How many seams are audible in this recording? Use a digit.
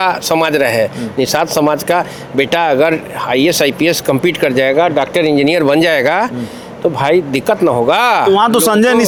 0